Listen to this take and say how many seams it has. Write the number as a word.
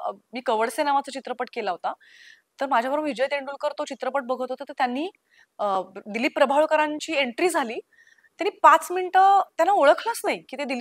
zero